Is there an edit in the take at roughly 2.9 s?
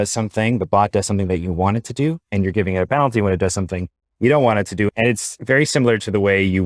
no; 1 cut; at 5.1 s

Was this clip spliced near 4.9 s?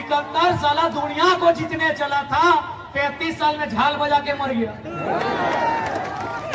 no; 0 cuts

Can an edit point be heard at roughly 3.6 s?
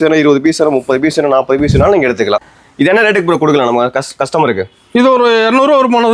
no; 1 cut; at 2.4 s

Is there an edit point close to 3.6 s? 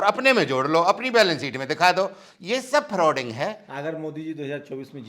no; 0 cuts

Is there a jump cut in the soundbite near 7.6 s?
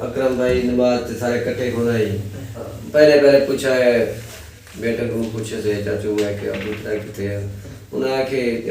no; 1 cut; at 2.7 s

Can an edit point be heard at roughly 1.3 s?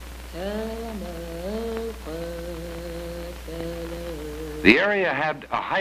yes; 1 cut; at 1.3 s

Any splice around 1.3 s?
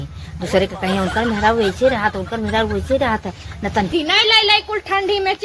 no; 1 cut; at 3.9 s

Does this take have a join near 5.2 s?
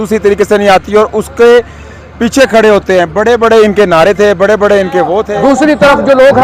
yes; 1 cut; at 5.2 s

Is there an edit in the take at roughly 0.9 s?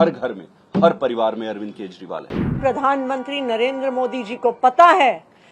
no; 1 cut; at 2.4 s

